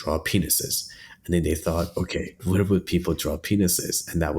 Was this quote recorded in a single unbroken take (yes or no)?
no